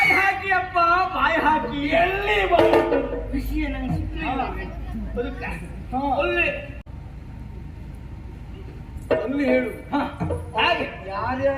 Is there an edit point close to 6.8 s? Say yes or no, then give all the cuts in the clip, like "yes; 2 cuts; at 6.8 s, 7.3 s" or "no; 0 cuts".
yes; 1 cut; at 6.8 s